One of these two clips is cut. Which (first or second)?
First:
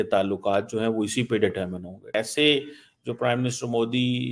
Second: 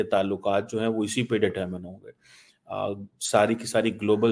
first